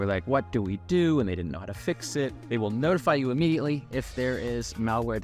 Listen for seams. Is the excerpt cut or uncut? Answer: cut